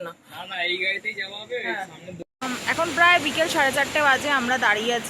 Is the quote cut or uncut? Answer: cut